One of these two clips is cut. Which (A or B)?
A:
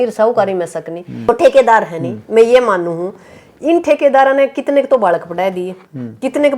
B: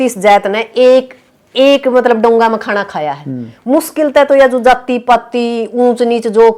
A